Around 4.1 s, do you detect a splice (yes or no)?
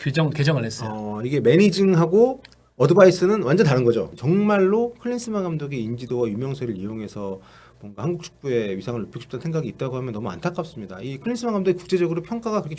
yes